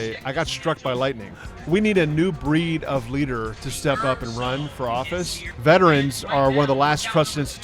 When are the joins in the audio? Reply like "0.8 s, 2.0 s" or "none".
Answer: 1.3 s, 5.4 s